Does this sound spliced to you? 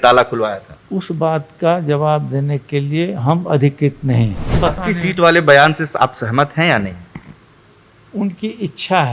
yes; 1 cut; at 4.6 s

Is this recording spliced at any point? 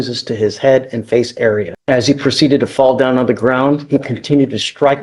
yes; 1 cut; at 1.7 s

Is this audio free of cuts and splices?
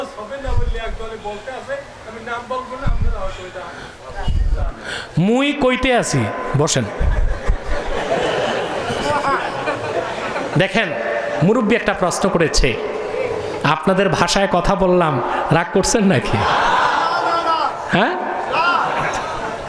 yes; 0 cuts

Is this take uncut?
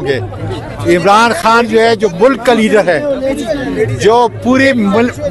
yes; 0 cuts

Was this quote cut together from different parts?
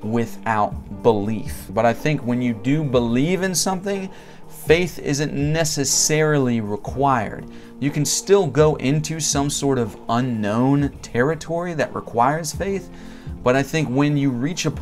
yes; 1 cut; at 1.6 s

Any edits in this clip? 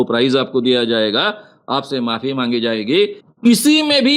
yes; 1 cut; at 3.2 s

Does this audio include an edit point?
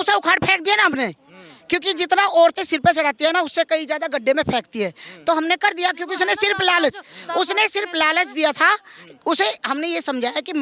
no; 0 cuts

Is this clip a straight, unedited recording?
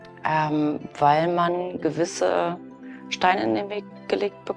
yes; 0 cuts

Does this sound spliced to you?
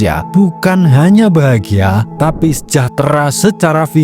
no; 0 cuts

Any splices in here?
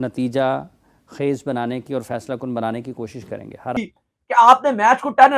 yes; 1 cut; at 3.7 s

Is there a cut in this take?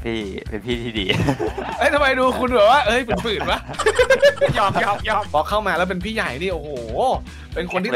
yes; 1 cut; at 5.3 s

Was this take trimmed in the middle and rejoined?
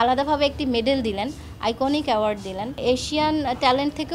yes; 1 cut; at 2.7 s

